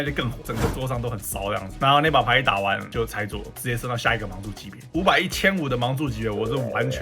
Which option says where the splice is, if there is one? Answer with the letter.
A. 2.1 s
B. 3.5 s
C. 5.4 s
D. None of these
B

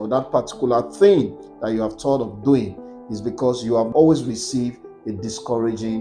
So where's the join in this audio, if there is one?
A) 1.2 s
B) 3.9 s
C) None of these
B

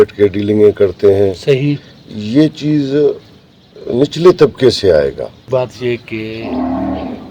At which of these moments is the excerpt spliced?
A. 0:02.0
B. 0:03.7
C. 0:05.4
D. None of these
C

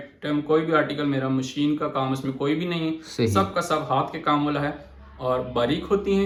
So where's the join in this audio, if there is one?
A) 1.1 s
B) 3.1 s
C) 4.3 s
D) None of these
D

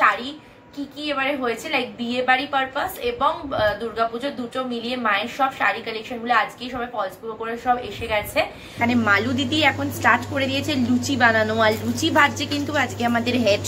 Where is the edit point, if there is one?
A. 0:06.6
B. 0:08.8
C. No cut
B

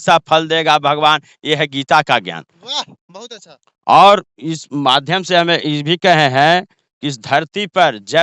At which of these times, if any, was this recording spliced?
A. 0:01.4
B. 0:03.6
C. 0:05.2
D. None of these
D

